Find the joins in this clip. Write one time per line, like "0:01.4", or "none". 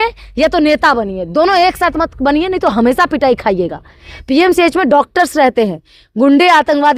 none